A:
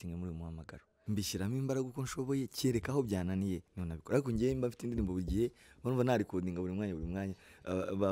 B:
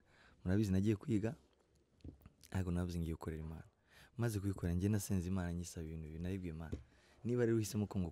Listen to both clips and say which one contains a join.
A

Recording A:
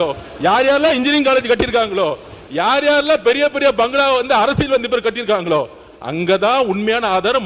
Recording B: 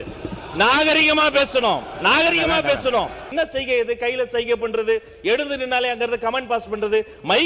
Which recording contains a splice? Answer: B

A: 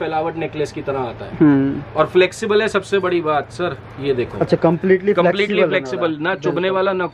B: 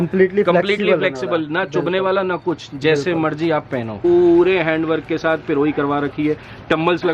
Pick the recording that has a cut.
B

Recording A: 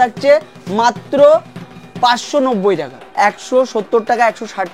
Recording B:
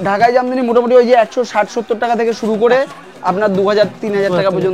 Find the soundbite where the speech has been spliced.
A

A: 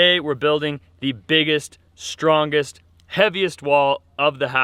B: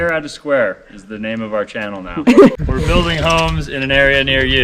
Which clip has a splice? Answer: B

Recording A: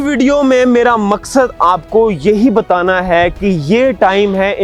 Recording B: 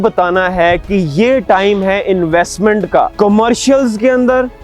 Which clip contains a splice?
B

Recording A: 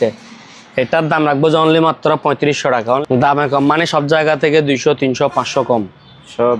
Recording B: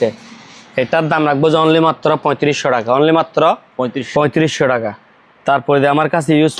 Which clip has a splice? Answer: A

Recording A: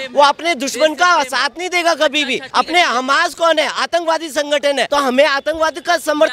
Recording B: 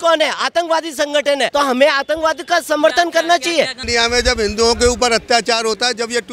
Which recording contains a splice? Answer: A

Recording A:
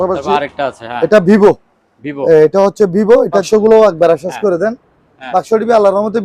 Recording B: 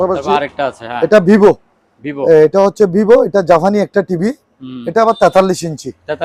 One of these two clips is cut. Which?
A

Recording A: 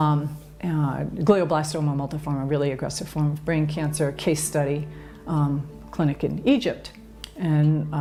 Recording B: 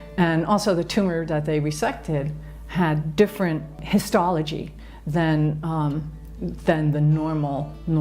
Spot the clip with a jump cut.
B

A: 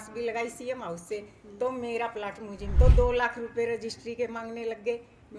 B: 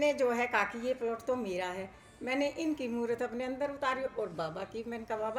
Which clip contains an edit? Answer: A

